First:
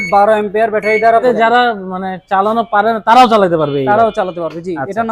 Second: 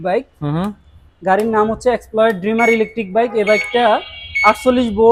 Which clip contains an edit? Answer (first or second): first